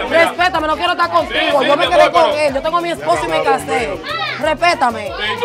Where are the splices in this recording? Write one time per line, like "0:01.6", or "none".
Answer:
none